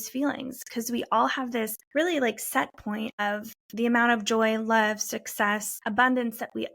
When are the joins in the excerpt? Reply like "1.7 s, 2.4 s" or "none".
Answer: 1.8 s, 3.2 s, 5.7 s